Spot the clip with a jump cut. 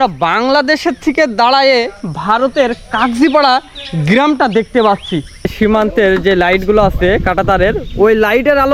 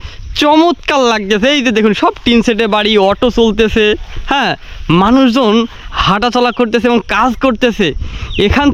first; 1 cut; at 5.5 s

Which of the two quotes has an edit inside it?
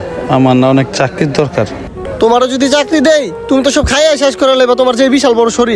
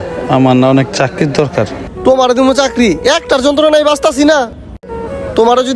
first; 1 cut; at 1.9 s

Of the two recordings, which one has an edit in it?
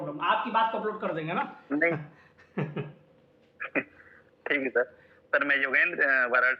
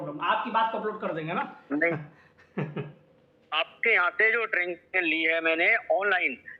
second; 1 cut; at 3.5 s

